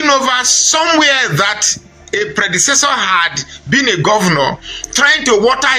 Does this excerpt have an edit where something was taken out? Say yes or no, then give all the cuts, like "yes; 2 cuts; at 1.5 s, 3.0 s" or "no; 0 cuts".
no; 0 cuts